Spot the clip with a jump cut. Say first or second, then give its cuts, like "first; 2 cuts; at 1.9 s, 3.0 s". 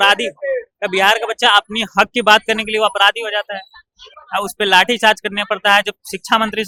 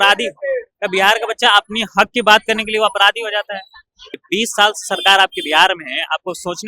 second; 1 cut; at 4.2 s